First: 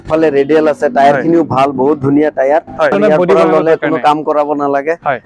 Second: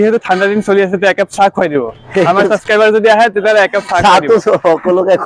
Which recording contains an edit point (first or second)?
first